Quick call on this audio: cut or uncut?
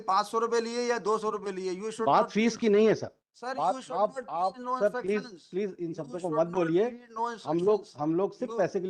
uncut